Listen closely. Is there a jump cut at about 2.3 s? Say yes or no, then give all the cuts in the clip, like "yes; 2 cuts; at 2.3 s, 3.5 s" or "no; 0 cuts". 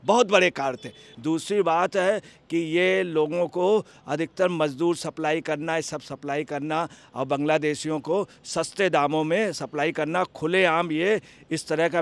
no; 1 cut; at 1.0 s